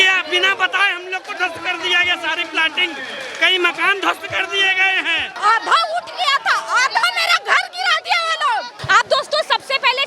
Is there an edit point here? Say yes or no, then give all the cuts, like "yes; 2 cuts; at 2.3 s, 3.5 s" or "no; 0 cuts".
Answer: yes; 2 cuts; at 5.2 s, 8.8 s